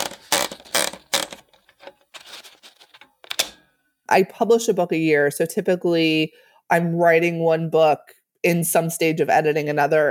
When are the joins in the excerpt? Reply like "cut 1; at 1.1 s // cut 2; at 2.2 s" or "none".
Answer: cut 1; at 4.0 s

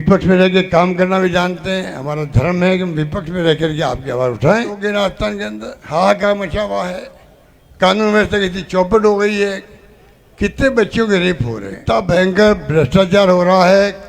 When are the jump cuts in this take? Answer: cut 1; at 4.8 s // cut 2; at 11.8 s

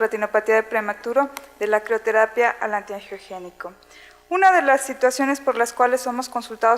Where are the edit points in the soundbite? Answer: none

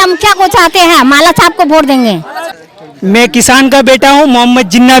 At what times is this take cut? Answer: cut 1; at 2.5 s

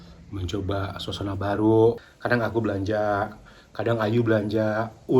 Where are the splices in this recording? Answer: cut 1; at 2.1 s

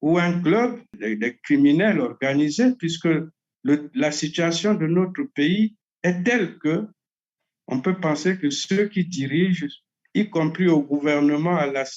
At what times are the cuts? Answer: cut 1; at 1.0 s // cut 2; at 5.9 s

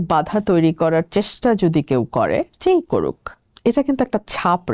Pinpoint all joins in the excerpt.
none

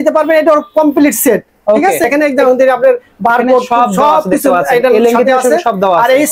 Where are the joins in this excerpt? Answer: cut 1; at 2.1 s

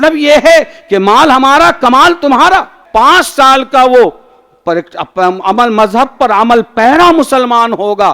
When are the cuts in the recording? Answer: cut 1; at 2.8 s

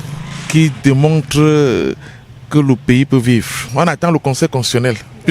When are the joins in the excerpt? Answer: cut 1; at 3.6 s

